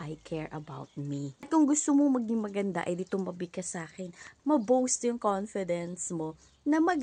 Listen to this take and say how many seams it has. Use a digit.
2